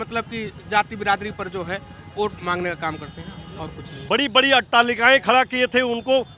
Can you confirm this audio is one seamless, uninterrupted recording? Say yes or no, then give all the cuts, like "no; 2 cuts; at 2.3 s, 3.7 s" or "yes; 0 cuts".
no; 1 cut; at 3.9 s